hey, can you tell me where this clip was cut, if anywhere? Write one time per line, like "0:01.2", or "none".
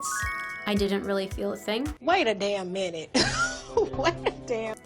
0:02.0